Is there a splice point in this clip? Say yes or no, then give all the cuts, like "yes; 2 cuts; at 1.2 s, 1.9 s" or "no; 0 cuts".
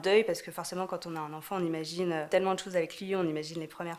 yes; 1 cut; at 2.3 s